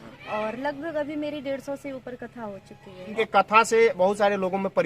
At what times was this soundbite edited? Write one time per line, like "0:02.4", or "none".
0:03.1